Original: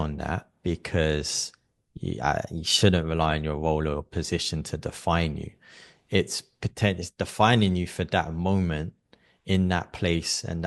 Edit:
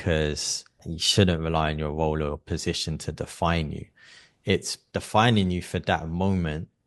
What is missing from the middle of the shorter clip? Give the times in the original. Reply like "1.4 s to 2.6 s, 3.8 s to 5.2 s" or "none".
1.8 s to 2.6 s, 6.5 s to 7.1 s